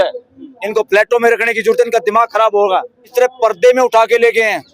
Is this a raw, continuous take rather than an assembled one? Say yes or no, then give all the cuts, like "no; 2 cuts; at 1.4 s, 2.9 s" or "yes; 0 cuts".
no; 1 cut; at 3.1 s